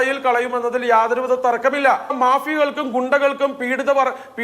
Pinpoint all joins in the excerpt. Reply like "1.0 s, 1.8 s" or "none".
2.2 s

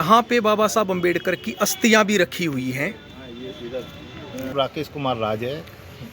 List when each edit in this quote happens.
4.5 s

